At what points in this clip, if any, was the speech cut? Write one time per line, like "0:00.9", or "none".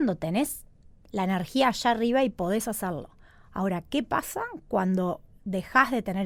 none